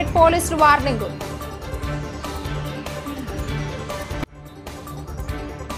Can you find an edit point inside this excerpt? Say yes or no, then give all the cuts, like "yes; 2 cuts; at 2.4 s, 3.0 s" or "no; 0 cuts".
yes; 1 cut; at 1.1 s